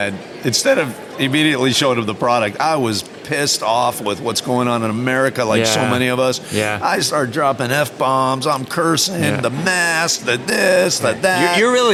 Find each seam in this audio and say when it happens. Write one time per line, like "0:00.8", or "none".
none